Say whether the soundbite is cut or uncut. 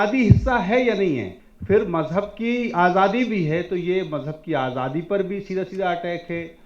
cut